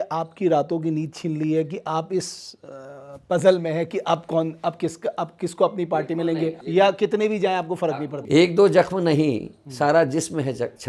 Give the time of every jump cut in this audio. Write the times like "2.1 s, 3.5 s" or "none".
6.6 s, 7.9 s